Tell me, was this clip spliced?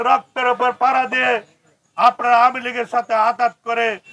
no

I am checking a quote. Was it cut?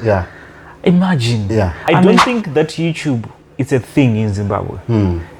yes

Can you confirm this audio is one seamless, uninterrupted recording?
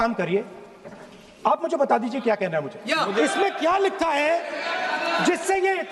no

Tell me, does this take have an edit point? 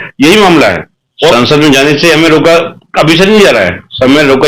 yes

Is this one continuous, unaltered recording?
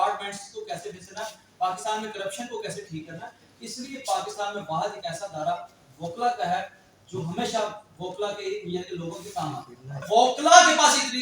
no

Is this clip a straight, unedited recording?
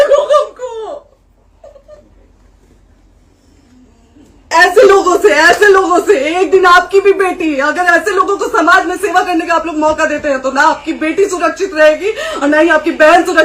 no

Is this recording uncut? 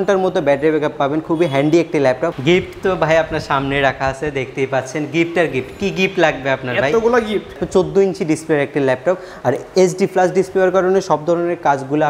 no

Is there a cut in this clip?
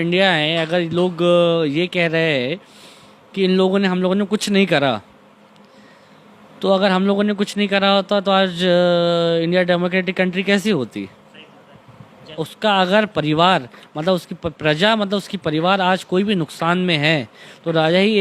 yes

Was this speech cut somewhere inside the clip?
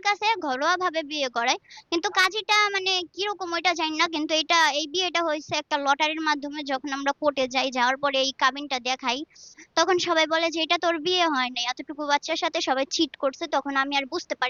no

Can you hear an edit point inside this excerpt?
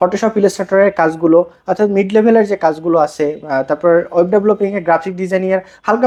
no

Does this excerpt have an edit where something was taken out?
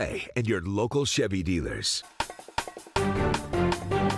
yes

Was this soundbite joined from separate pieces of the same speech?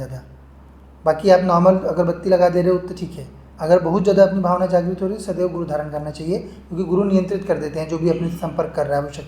no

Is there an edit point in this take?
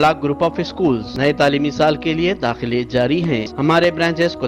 yes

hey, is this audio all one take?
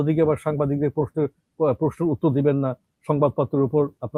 yes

